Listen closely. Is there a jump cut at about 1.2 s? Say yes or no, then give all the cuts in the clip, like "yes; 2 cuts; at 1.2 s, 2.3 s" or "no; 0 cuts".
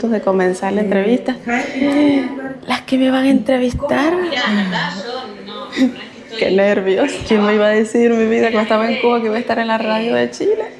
no; 0 cuts